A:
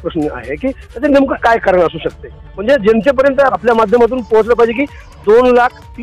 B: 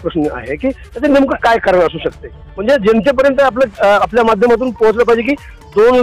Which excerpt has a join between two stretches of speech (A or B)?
A